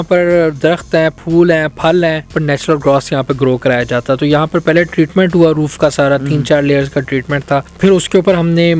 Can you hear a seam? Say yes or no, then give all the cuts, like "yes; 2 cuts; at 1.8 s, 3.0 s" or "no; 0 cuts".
yes; 2 cuts; at 2.3 s, 7.7 s